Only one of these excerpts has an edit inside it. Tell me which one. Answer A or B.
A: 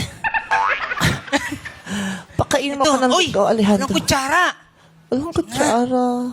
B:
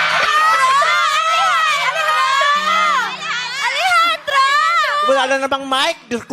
B